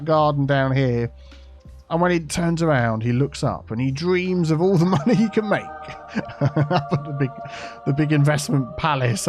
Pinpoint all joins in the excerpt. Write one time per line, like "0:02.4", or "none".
none